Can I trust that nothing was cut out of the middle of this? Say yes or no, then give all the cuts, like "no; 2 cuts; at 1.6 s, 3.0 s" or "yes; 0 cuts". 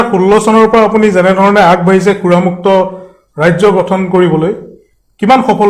yes; 0 cuts